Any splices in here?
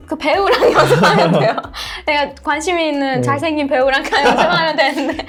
no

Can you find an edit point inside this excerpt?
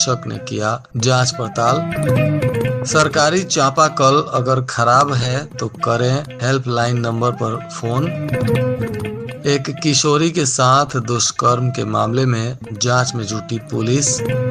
no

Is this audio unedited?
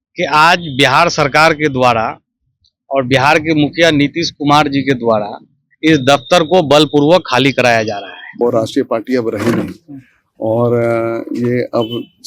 no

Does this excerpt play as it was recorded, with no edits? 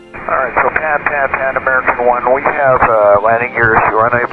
yes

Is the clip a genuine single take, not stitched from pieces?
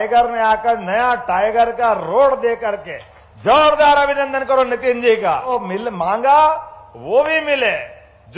no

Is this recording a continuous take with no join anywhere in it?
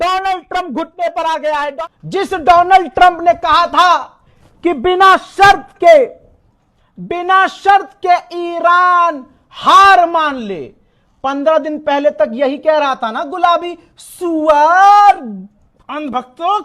no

